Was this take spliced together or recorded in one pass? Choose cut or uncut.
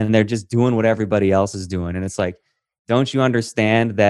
uncut